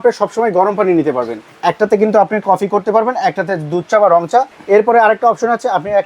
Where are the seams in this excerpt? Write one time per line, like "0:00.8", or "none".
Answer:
0:01.4
0:04.6